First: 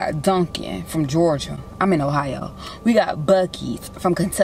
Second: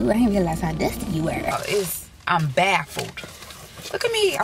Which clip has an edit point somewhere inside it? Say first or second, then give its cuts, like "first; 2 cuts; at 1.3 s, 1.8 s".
second; 1 cut; at 1.5 s